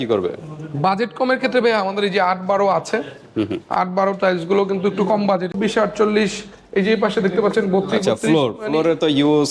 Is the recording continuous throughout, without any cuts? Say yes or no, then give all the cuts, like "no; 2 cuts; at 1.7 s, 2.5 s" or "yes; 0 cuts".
no; 1 cut; at 5.5 s